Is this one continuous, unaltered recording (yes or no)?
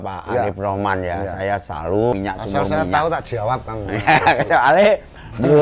no